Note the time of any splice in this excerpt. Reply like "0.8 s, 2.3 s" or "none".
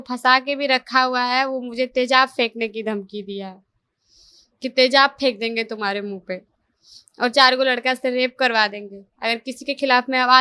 none